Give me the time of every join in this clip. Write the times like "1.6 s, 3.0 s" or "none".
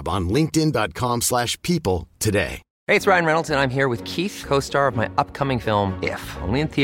2.7 s